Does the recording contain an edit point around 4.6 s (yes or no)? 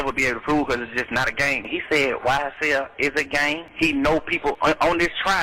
yes